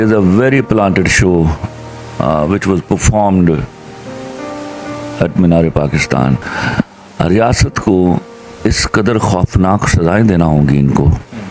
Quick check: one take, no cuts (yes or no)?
no